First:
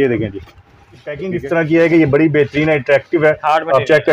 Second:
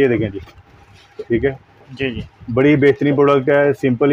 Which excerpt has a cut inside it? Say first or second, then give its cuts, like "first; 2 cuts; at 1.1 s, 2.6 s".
first; 1 cut; at 1.2 s